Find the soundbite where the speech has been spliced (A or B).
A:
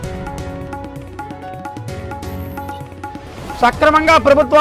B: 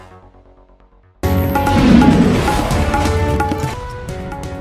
A